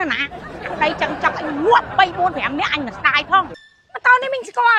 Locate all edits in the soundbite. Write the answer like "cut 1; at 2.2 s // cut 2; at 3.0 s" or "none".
cut 1; at 3.5 s